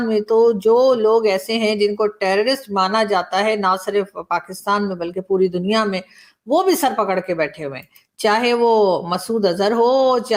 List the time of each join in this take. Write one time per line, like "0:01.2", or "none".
none